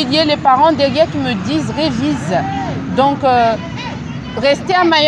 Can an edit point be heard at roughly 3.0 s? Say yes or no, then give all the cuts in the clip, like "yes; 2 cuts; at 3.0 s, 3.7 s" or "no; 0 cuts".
no; 0 cuts